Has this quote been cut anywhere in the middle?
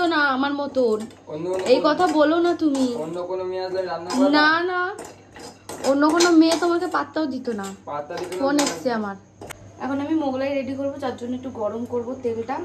no; 0 cuts

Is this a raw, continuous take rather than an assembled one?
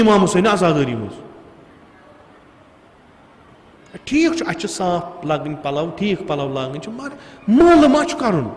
yes; 0 cuts

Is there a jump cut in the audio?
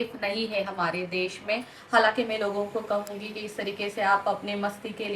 yes; 1 cut; at 1.8 s

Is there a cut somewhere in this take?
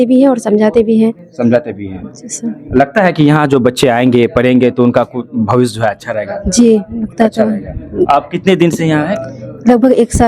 no; 0 cuts

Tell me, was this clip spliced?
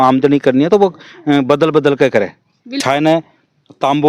yes; 1 cut; at 2.8 s

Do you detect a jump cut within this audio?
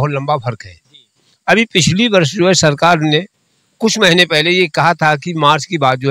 no; 0 cuts

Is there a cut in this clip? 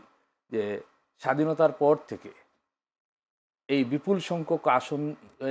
no; 0 cuts

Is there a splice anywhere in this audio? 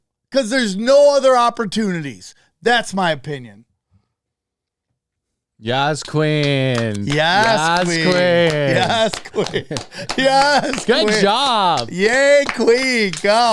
no; 0 cuts

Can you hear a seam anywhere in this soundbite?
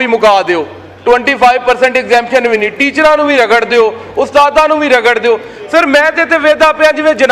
no; 0 cuts

